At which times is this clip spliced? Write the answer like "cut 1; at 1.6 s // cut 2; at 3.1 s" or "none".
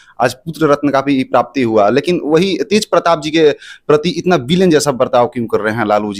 none